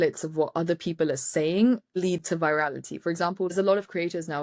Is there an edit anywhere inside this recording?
yes; 1 cut; at 3.5 s

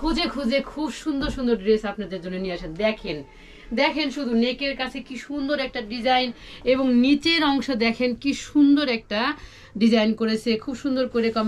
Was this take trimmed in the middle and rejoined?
no; 0 cuts

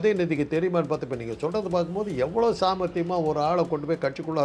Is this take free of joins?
yes; 0 cuts

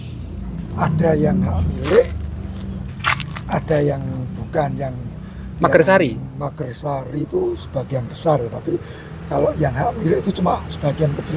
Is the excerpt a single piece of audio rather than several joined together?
yes; 0 cuts

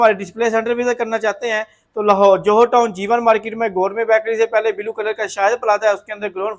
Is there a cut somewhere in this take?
no; 0 cuts

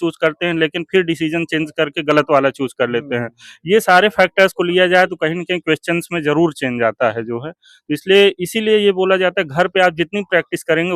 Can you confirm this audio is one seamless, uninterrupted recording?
yes; 0 cuts

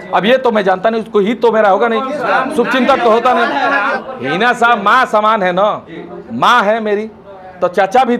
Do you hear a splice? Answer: yes; 1 cut; at 4.0 s

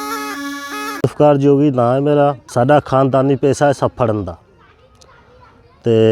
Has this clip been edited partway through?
yes; 2 cuts; at 1.0 s, 2.4 s

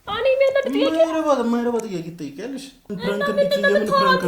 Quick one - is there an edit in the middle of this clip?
yes; 1 cut; at 2.9 s

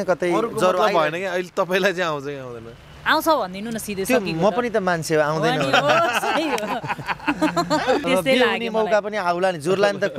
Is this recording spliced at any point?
yes; 1 cut; at 8.0 s

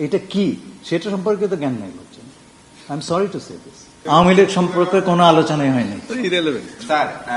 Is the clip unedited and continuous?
no; 1 cut; at 3.9 s

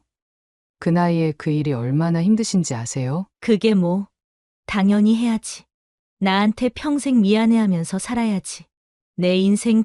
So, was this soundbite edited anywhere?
yes; 1 cut; at 3.3 s

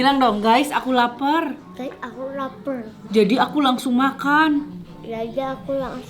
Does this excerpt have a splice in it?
no; 0 cuts

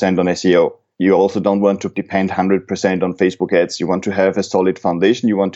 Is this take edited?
yes; 1 cut; at 1.9 s

